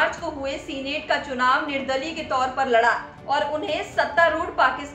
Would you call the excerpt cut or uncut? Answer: cut